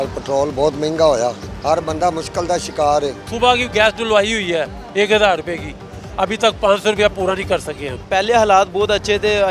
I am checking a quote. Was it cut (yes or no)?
yes